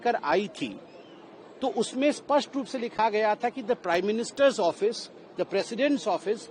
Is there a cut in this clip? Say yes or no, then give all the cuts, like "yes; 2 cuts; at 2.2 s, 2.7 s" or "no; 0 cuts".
no; 0 cuts